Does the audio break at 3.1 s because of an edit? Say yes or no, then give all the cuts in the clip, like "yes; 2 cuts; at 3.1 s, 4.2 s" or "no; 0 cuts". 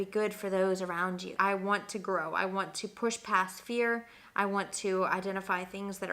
no; 1 cut; at 1.3 s